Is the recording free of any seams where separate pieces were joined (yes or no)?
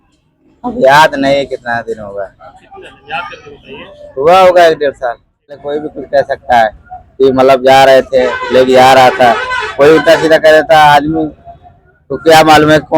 no